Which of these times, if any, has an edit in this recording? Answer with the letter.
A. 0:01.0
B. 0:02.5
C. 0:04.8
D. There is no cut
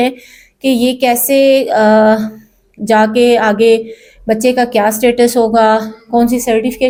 D